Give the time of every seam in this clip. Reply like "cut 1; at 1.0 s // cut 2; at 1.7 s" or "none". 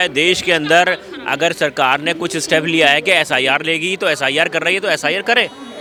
none